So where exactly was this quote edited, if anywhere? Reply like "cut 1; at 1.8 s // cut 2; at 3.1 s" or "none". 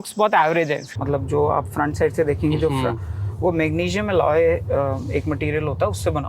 cut 1; at 0.9 s